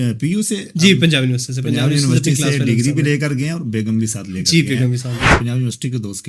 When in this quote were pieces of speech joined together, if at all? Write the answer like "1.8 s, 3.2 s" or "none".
5.2 s